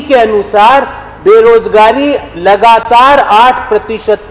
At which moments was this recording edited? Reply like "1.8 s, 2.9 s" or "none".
none